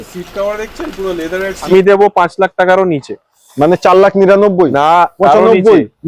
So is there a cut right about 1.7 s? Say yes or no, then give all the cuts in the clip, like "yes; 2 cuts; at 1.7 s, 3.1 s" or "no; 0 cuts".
yes; 1 cut; at 1.7 s